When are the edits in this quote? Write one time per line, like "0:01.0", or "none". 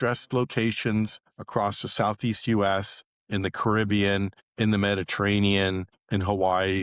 none